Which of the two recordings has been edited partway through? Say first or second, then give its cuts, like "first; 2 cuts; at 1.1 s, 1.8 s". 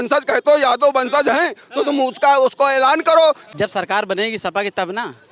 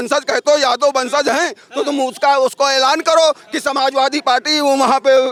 first; 1 cut; at 3.5 s